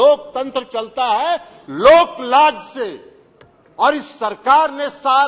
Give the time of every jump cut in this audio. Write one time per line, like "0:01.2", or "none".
none